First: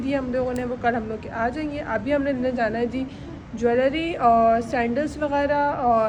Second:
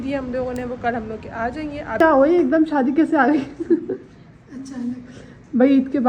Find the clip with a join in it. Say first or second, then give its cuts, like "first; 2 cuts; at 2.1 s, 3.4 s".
second; 1 cut; at 2.0 s